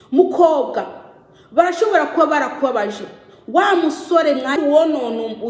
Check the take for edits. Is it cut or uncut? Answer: cut